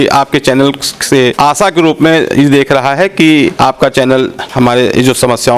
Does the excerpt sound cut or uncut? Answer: cut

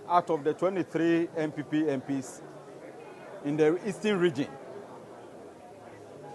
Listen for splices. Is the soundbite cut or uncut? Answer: uncut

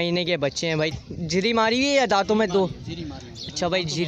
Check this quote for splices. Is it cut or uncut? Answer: cut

